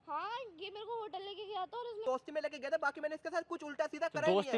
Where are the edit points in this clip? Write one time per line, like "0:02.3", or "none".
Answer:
0:02.0

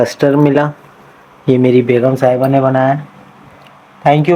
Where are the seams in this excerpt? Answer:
none

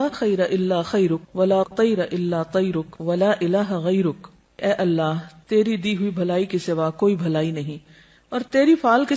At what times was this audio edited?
0:02.9
0:04.6

